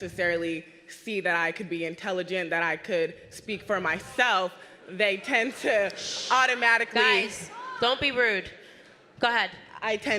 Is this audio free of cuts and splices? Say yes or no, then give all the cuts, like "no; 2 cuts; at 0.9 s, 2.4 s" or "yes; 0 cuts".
yes; 0 cuts